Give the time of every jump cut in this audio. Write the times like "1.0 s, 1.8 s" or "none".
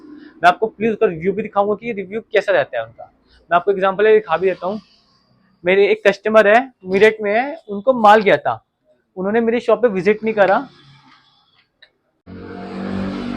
12.3 s